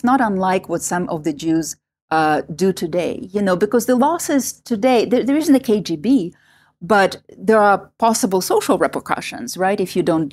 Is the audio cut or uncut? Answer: uncut